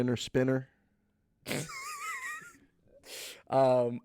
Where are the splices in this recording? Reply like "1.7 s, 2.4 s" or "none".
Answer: none